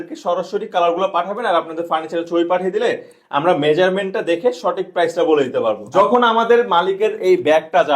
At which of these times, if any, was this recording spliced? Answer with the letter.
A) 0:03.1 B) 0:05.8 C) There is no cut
B